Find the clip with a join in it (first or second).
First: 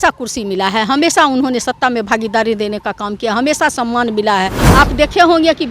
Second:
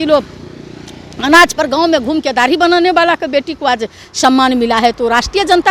first